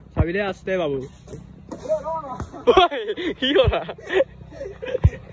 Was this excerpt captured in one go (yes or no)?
yes